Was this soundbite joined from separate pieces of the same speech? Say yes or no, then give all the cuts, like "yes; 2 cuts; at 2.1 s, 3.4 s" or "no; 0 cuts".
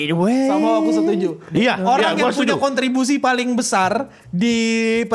no; 0 cuts